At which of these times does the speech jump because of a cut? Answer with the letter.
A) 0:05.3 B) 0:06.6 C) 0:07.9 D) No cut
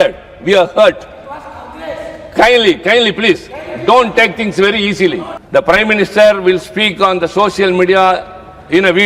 A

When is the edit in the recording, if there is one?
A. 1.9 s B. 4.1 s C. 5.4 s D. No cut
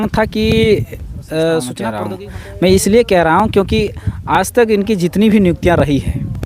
A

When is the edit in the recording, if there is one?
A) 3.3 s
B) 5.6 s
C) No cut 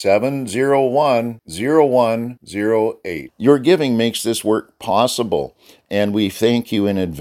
C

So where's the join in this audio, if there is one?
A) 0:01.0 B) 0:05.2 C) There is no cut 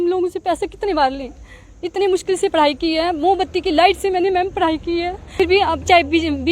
B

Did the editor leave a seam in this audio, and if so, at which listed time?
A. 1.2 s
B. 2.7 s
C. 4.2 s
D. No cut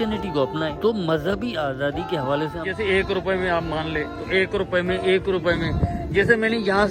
B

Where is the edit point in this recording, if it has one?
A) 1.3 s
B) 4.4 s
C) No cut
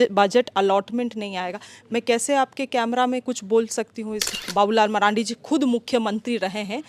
B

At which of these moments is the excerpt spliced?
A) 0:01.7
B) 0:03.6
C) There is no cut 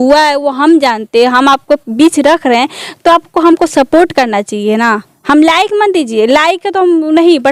C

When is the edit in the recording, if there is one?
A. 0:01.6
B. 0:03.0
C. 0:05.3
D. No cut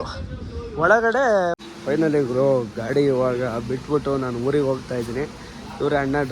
A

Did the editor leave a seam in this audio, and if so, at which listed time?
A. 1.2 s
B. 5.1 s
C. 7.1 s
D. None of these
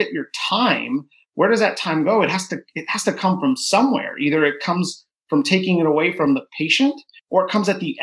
C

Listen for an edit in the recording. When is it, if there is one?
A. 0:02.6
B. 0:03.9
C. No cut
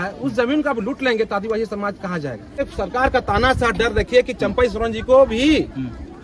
A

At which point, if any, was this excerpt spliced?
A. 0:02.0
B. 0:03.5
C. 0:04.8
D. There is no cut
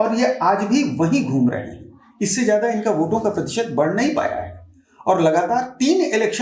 D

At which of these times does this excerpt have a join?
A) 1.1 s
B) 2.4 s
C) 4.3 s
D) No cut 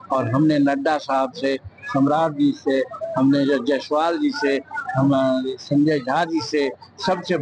D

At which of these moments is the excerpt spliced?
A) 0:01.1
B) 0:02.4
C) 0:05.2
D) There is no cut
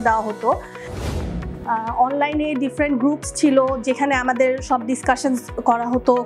A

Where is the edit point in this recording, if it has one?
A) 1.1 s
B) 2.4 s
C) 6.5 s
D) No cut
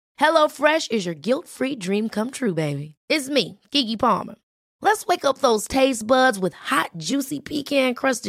D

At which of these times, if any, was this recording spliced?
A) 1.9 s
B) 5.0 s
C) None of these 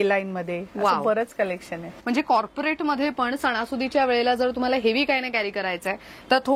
A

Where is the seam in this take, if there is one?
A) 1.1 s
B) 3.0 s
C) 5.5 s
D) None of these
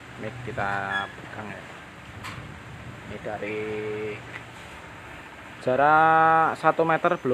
D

